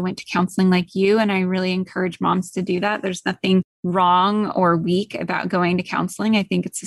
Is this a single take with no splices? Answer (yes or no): no